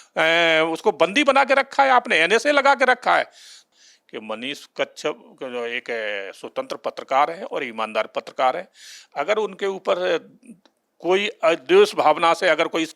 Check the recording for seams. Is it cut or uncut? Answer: cut